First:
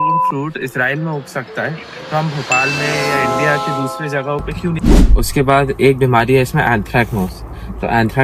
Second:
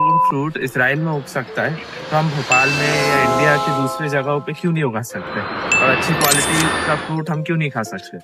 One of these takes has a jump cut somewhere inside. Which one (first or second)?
first